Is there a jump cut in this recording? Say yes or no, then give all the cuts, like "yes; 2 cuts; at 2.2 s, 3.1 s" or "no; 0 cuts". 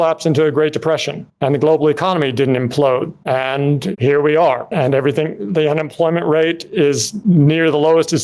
no; 0 cuts